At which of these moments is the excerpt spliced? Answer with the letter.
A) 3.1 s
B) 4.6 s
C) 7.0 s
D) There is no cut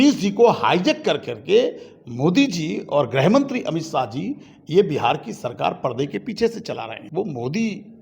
C